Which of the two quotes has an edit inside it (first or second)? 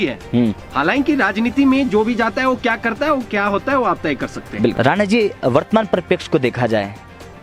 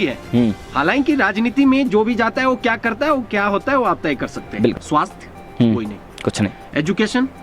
second